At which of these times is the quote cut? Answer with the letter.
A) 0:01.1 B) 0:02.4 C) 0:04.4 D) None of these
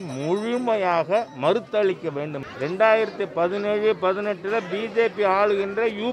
B